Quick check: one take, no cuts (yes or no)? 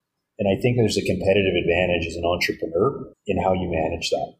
no